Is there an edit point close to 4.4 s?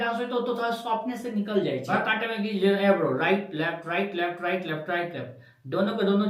no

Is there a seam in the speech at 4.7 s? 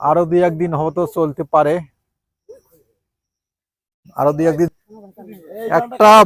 yes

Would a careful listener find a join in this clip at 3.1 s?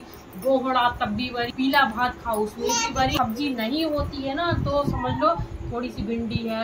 yes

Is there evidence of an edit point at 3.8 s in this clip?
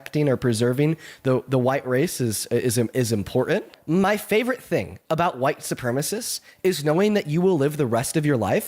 yes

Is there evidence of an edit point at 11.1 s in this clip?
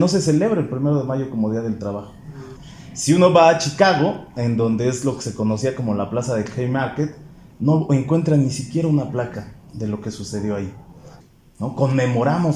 yes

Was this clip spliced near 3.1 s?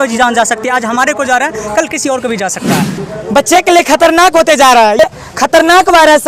yes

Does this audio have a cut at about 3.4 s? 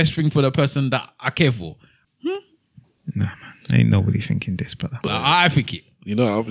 no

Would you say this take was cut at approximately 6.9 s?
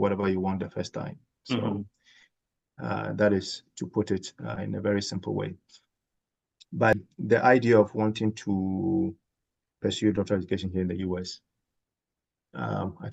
yes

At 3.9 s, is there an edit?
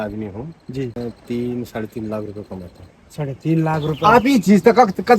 yes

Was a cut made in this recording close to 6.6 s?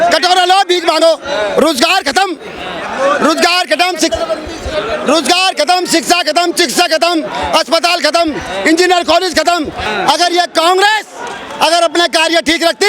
no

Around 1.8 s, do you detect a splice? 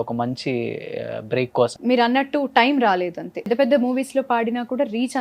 yes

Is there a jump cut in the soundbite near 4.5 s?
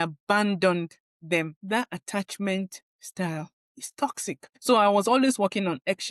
yes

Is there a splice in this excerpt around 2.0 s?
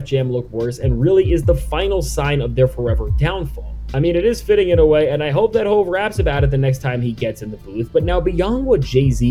no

